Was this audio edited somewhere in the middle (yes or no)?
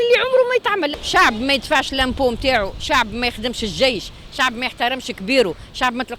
yes